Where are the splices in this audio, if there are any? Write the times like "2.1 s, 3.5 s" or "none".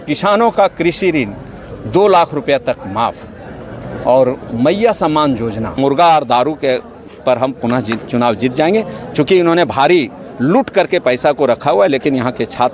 5.8 s